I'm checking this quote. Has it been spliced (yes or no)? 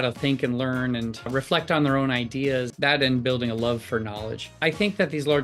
yes